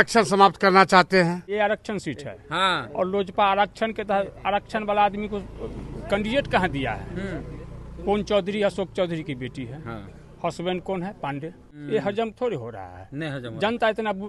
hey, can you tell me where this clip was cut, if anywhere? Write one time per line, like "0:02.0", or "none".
0:01.5
0:11.7